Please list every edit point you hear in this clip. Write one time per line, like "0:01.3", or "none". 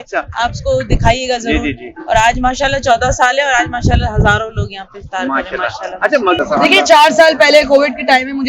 0:06.4